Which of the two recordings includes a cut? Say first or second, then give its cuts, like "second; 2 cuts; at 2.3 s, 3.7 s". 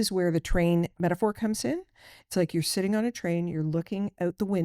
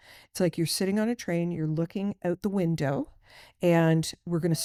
first; 1 cut; at 0.9 s